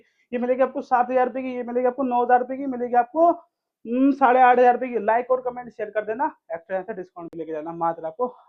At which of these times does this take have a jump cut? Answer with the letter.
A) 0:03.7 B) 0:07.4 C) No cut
C